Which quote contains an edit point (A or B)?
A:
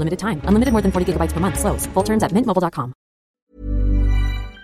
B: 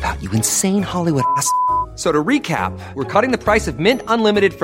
A